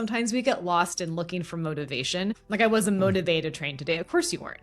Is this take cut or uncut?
cut